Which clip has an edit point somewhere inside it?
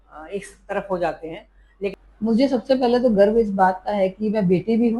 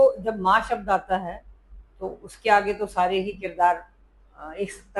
first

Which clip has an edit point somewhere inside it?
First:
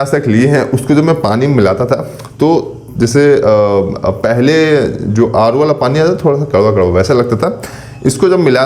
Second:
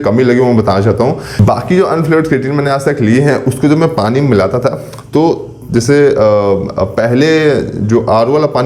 second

